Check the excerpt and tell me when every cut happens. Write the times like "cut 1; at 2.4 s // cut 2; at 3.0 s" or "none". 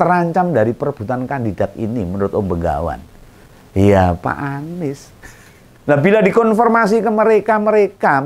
cut 1; at 5.1 s